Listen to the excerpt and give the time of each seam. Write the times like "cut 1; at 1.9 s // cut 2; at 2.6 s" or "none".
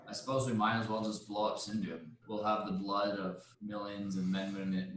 cut 1; at 2.1 s // cut 2; at 3.5 s